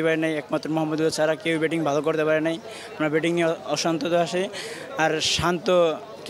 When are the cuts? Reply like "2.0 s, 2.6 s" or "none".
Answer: none